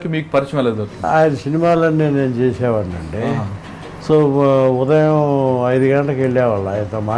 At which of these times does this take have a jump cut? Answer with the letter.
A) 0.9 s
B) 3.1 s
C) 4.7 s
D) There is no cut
A